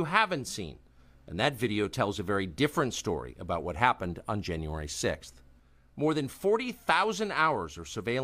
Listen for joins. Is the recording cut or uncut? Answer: cut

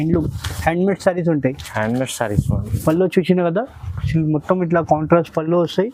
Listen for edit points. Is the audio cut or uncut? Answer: uncut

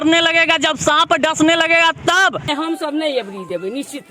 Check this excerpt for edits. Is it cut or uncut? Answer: cut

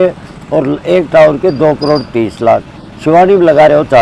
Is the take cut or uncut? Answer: uncut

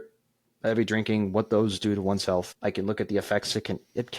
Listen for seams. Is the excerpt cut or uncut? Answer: cut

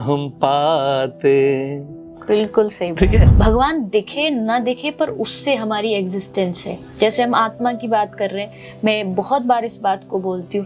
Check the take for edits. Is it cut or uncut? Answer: cut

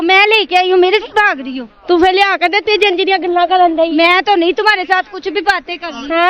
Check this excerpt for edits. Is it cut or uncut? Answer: uncut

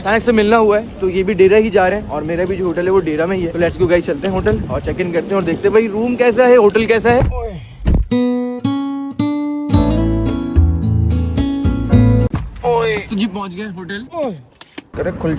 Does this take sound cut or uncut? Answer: uncut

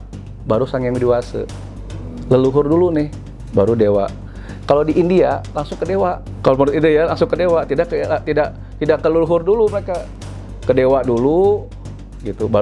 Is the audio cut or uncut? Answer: uncut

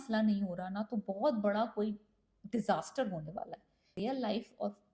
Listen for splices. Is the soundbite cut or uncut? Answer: cut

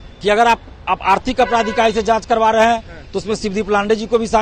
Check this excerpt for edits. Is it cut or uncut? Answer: uncut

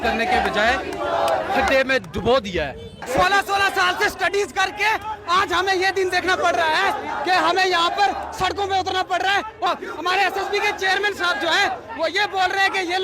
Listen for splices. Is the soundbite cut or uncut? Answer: cut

